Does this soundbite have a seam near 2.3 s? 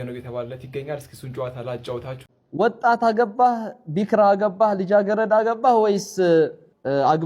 yes; 1 cut; at 2.3 s

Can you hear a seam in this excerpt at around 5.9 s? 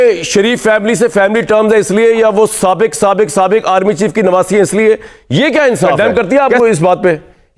yes; 1 cut; at 5.9 s

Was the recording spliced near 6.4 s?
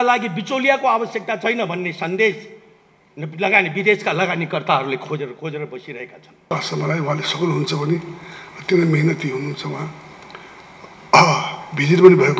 yes; 1 cut; at 6.4 s

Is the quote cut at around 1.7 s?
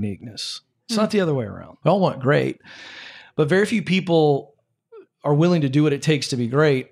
yes; 1 cut; at 1.7 s

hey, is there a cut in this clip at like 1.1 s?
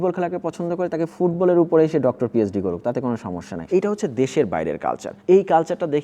no; 1 cut; at 3.5 s

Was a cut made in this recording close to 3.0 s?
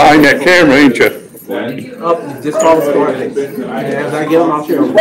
no; 0 cuts

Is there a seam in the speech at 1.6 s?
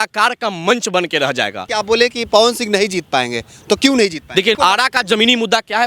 yes; 2 cuts; at 1.6 s, 4.6 s

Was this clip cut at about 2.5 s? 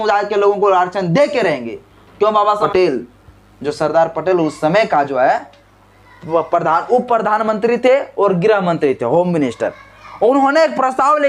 yes; 1 cut; at 2.5 s

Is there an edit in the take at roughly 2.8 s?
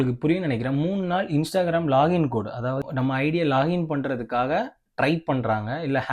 yes; 1 cut; at 2.8 s

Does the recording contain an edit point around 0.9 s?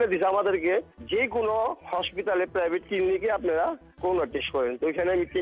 yes; 1 cut; at 0.9 s

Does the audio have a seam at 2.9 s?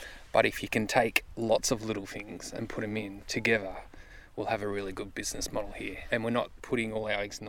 no; 2 cuts; at 6.0 s, 6.6 s

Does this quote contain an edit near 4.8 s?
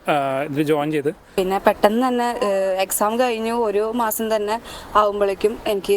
no; 1 cut; at 1.3 s

